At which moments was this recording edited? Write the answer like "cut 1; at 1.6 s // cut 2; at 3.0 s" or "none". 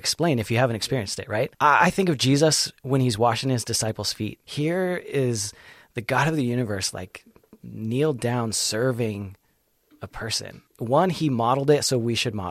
cut 1; at 1.5 s // cut 2; at 4.4 s // cut 3; at 10.6 s